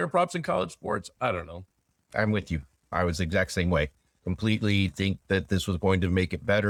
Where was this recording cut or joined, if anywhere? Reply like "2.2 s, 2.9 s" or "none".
none